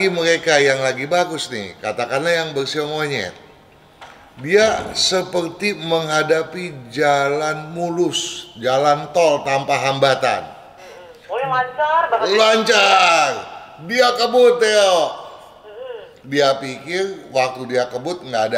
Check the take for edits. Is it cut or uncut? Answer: uncut